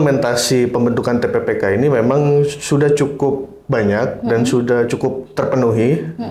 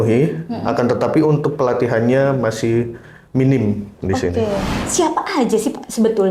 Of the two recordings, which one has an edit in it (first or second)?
second